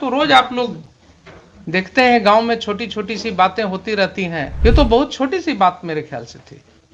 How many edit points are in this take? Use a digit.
1